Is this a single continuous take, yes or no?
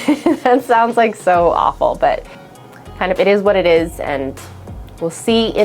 no